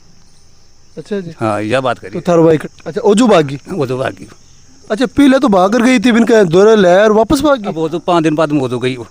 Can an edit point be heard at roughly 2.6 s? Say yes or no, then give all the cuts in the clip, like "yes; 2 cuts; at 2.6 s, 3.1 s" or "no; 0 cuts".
yes; 1 cut; at 2.6 s